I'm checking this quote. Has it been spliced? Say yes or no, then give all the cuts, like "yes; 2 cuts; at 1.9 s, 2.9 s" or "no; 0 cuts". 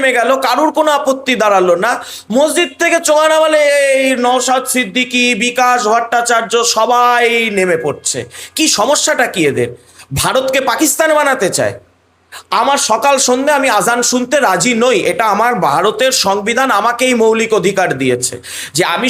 no; 0 cuts